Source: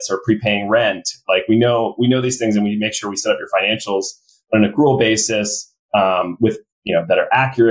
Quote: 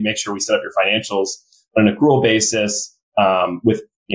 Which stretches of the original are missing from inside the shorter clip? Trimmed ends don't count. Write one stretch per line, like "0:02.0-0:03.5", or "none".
none